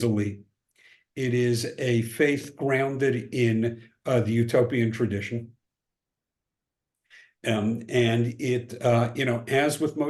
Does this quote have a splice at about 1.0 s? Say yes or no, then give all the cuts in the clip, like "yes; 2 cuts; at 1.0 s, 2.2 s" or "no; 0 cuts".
no; 0 cuts